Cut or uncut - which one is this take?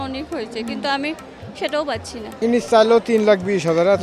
cut